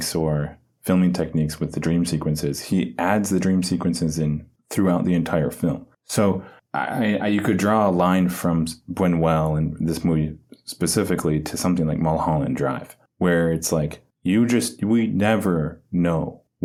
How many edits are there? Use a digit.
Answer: 0